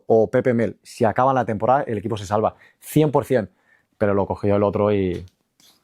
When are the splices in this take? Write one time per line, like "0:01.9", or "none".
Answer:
none